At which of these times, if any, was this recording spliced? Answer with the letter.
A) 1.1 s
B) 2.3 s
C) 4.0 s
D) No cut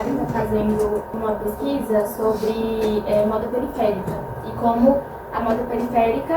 A